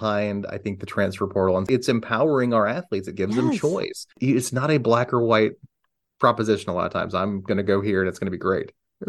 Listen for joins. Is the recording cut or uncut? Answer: cut